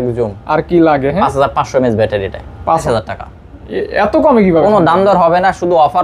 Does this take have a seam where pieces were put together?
yes; 1 cut; at 2.8 s

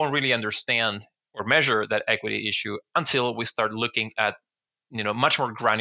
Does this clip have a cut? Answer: no; 0 cuts

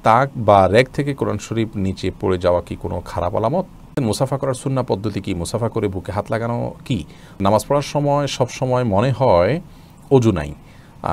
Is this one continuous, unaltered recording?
no; 2 cuts; at 3.9 s, 7.4 s

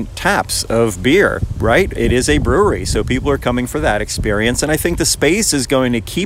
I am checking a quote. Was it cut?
yes; 1 cut; at 1.9 s

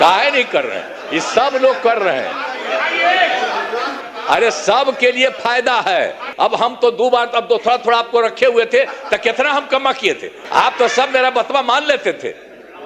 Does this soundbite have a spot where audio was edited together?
yes; 3 cuts; at 3.9 s, 6.3 s, 10.3 s

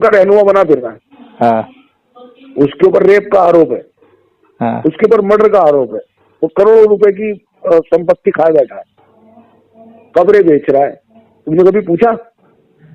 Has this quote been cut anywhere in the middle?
no; 0 cuts

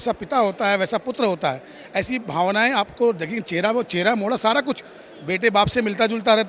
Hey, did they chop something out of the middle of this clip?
no; 0 cuts

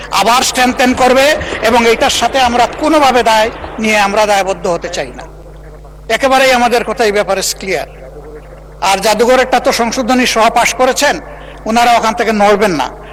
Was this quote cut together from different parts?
no; 0 cuts

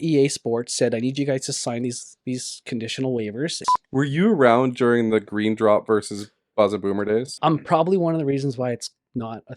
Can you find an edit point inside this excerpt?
yes; 2 cuts; at 3.6 s, 7.3 s

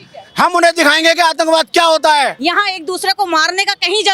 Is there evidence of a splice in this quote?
yes; 1 cut; at 2.4 s

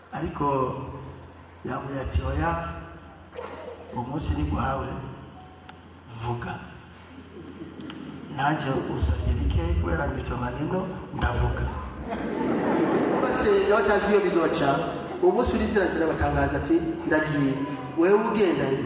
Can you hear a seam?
yes; 1 cut; at 13.4 s

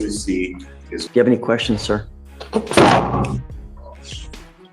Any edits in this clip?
yes; 1 cut; at 1.0 s

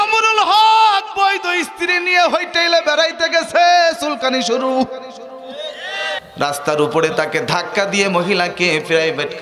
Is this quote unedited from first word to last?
no; 1 cut; at 6.1 s

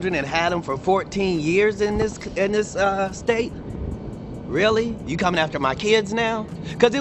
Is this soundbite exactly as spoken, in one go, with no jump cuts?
yes; 0 cuts

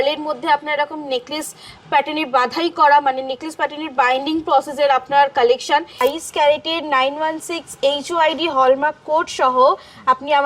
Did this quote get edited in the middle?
yes; 1 cut; at 6.0 s

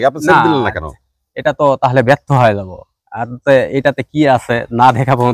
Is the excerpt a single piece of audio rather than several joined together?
yes; 0 cuts

